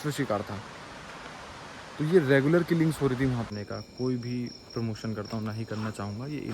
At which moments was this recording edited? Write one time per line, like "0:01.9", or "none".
0:03.5